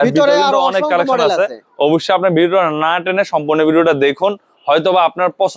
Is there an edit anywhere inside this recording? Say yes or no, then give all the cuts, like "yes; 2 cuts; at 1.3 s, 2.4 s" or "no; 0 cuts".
no; 0 cuts